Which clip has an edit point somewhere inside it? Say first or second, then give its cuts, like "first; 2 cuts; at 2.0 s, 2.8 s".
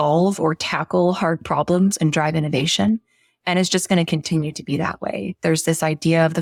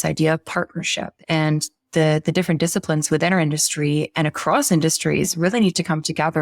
second; 1 cut; at 1.1 s